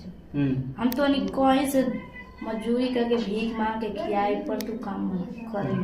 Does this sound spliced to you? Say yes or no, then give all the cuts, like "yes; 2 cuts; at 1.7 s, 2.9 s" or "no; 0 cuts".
no; 0 cuts